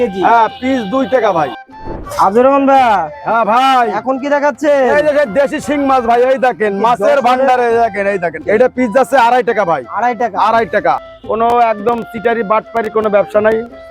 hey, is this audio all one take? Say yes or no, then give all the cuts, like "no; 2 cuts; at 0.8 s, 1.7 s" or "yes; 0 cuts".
no; 3 cuts; at 1.6 s, 8.4 s, 11.1 s